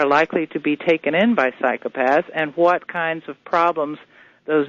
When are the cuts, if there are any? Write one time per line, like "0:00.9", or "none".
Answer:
none

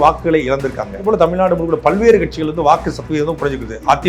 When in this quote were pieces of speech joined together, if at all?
0:01.0

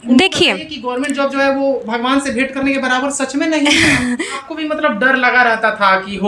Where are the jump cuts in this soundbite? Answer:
0:04.3

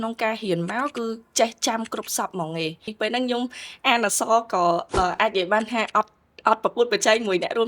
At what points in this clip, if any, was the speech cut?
0:02.9

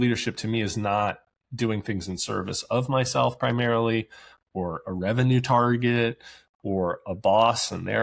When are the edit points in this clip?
none

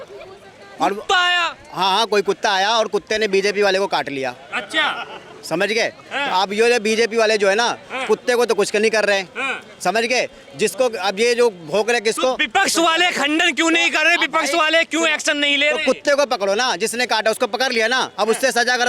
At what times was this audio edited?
none

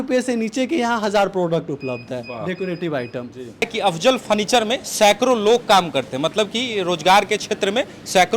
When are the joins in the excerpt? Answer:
0:03.7

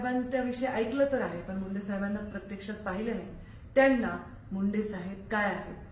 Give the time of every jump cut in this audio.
none

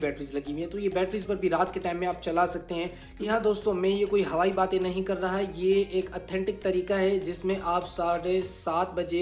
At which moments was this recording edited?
0:03.3

